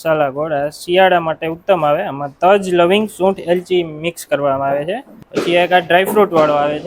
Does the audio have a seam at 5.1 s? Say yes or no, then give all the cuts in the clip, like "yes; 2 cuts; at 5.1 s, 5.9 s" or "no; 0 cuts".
yes; 1 cut; at 5.1 s